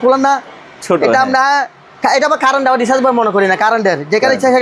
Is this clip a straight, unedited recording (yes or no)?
yes